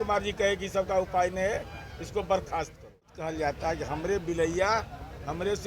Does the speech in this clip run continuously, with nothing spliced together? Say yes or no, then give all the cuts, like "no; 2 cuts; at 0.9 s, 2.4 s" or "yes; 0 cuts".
no; 1 cut; at 3.2 s